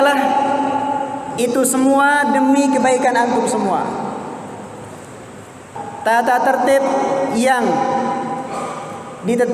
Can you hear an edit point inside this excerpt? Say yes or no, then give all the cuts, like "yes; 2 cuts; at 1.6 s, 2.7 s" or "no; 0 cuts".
no; 0 cuts